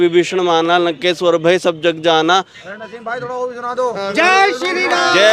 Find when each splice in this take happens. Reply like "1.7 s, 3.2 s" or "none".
none

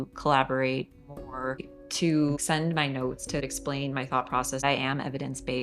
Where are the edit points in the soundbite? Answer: 1.7 s, 3.4 s, 4.6 s

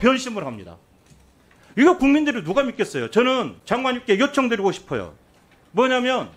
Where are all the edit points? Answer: 3.6 s

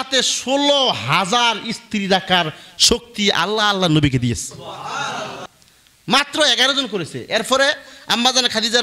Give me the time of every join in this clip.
none

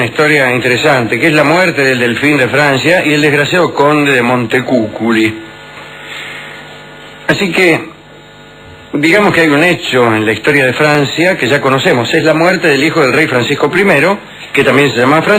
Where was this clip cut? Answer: none

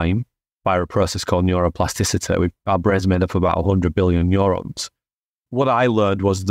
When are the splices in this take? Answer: 5.5 s

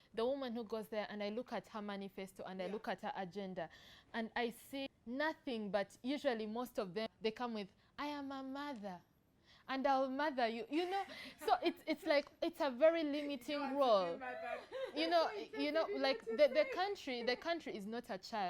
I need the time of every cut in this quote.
4.9 s, 7.1 s

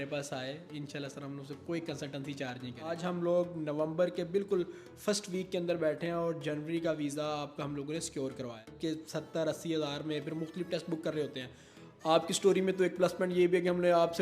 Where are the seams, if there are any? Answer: 2.9 s, 8.8 s

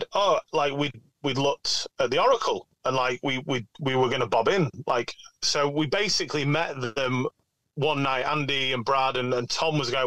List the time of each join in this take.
none

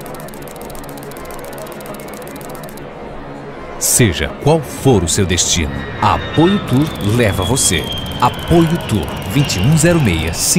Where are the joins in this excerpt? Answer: 1.5 s

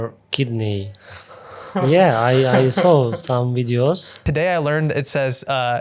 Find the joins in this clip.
4.1 s

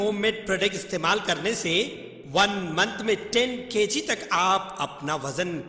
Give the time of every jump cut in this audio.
none

